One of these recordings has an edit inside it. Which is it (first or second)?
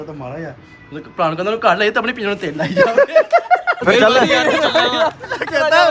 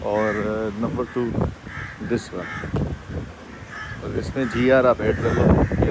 first